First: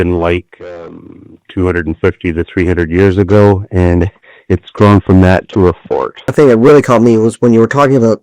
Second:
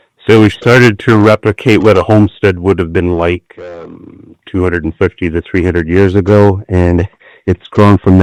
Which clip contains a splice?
first; 1 cut; at 6.2 s

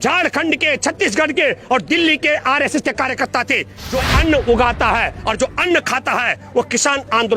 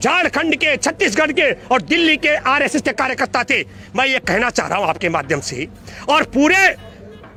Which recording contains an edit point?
first; 1 cut; at 3.8 s

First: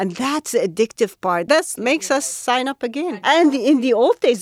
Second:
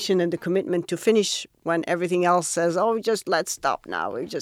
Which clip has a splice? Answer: first; 2 cuts; at 1.6 s, 3.2 s

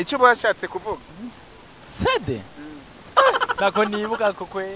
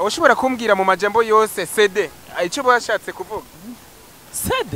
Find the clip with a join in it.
first; 1 cut; at 3.5 s

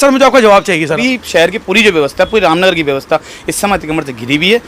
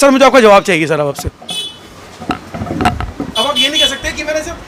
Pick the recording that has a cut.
first; 1 cut; at 1.0 s

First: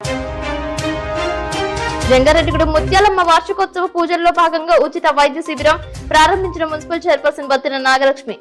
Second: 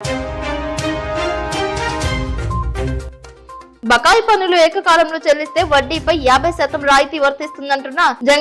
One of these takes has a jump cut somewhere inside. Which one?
second; 1 cut; at 1.9 s

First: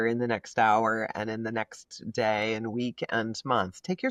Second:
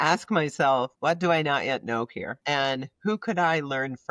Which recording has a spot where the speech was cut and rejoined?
second; 2 cuts; at 0.9 s, 2.3 s

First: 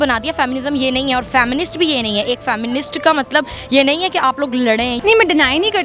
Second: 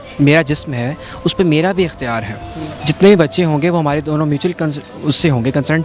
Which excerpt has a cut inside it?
first; 1 cut; at 5.0 s

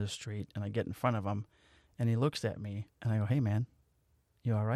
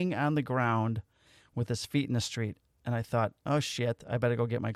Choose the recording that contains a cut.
first; 1 cut; at 2.9 s

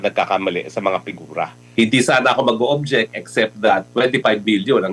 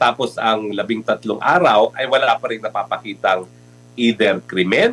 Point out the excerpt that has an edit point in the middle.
first; 1 cut; at 1.6 s

